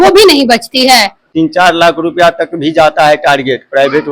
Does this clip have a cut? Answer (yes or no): yes